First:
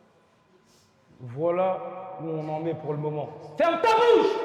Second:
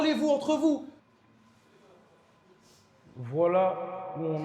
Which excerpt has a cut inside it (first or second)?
second